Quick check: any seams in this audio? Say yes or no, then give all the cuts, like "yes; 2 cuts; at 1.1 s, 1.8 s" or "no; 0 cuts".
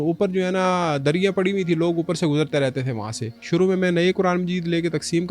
yes; 1 cut; at 3.3 s